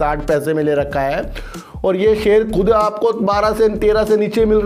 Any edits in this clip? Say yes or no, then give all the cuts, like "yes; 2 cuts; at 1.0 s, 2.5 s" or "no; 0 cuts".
no; 0 cuts